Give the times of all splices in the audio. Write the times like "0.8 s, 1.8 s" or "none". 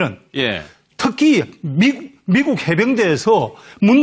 none